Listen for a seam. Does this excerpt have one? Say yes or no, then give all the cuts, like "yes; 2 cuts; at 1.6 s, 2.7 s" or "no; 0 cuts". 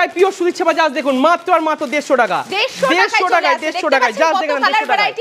no; 0 cuts